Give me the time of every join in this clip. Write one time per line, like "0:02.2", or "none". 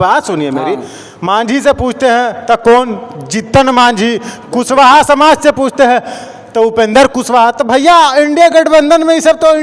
none